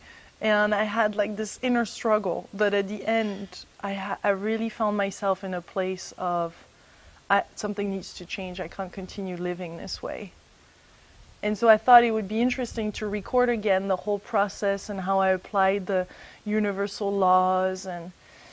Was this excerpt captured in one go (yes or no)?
no